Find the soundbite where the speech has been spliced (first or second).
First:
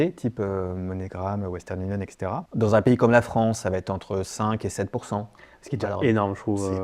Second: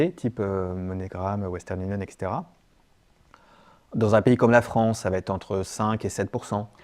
first